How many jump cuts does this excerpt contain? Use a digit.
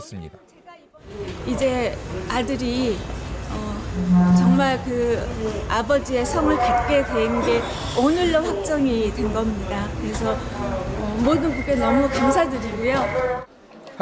1